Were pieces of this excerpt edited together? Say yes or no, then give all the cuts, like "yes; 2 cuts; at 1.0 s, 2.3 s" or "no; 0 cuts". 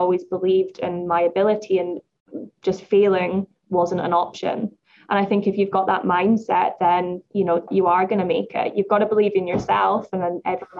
yes; 1 cut; at 7.7 s